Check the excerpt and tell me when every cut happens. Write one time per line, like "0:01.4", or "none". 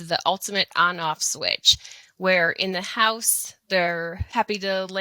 none